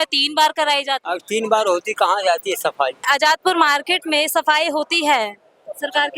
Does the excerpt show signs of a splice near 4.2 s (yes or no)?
no